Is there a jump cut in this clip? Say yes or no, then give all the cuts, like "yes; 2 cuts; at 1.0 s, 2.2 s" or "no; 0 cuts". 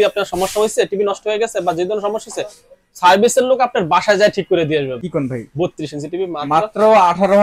yes; 1 cut; at 5.0 s